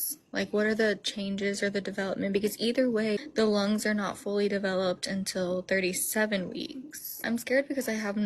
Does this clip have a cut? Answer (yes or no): yes